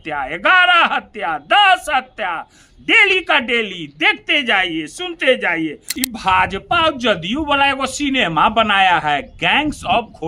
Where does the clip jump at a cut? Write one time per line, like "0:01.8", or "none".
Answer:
0:05.9